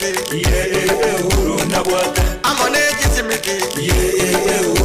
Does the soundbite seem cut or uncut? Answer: uncut